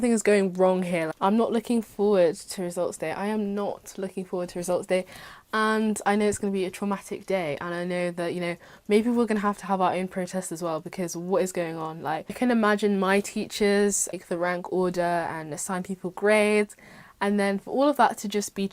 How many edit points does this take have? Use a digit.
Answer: 3